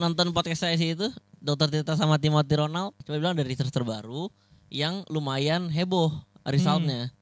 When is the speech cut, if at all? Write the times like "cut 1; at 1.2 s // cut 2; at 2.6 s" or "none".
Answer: cut 1; at 3.0 s